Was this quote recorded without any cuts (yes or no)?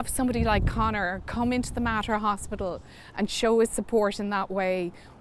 yes